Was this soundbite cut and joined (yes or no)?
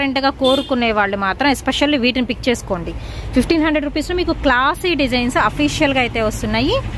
no